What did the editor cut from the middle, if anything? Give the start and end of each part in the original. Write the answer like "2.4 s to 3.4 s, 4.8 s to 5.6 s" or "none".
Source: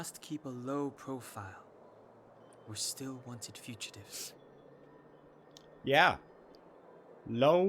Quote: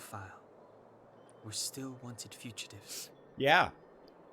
4.5 s to 5.7 s